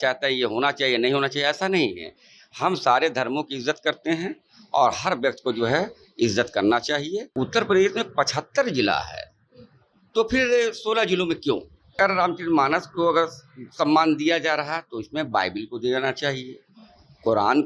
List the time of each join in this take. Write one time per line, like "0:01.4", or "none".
0:07.2
0:11.9

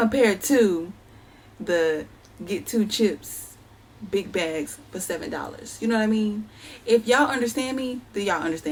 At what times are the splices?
none

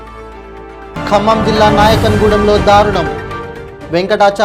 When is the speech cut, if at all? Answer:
0:00.9

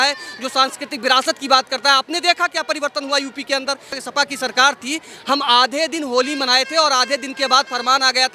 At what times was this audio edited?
0:04.0

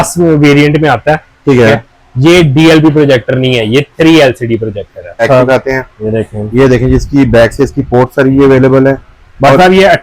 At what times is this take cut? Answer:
0:05.2

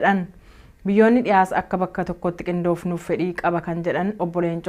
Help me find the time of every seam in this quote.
0:00.9

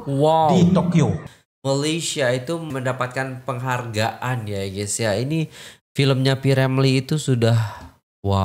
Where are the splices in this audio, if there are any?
0:01.2

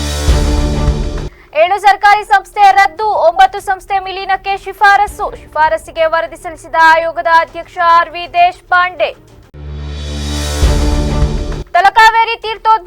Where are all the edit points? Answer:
0:01.2

